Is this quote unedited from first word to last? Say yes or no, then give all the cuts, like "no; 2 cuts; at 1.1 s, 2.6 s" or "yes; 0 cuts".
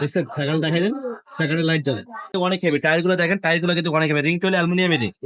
no; 1 cut; at 2.3 s